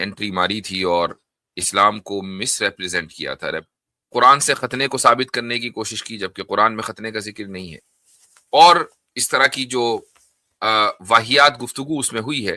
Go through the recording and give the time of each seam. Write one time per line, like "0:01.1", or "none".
0:03.6